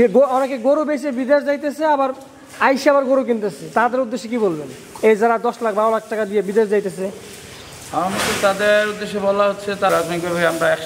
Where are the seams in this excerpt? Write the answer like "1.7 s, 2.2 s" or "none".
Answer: 9.9 s